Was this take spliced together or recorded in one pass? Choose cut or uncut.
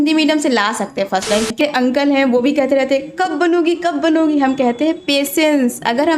cut